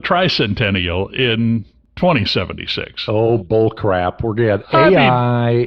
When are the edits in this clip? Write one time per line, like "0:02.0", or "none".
0:01.8

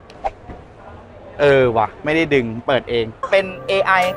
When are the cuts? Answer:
0:03.3

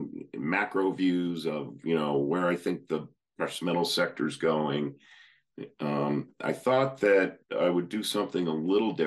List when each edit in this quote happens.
none

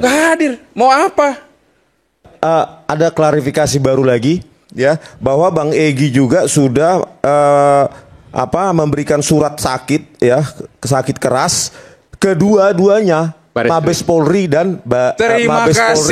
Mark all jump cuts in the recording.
0:02.3

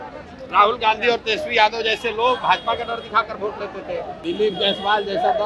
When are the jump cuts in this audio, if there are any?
0:04.1

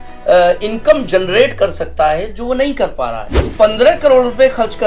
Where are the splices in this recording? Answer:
0:03.4

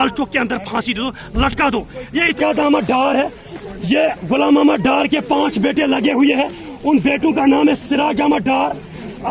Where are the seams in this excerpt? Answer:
0:02.6

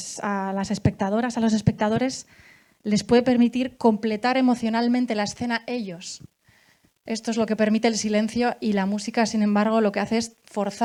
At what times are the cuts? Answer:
none

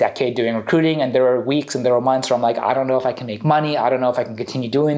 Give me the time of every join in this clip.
none

